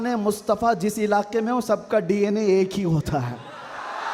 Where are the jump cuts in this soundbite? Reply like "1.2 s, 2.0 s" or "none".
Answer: none